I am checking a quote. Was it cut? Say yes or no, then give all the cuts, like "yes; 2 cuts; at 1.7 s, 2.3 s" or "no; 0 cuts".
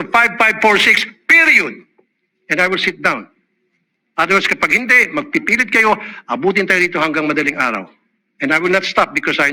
no; 0 cuts